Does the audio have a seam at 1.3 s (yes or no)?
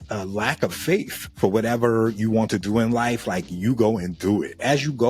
yes